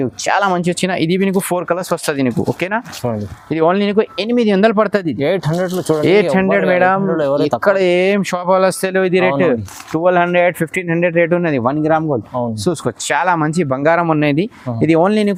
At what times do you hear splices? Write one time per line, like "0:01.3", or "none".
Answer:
none